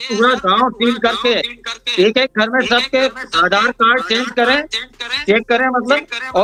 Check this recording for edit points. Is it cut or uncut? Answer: uncut